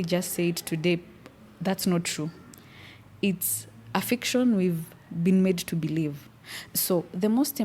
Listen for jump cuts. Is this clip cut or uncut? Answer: uncut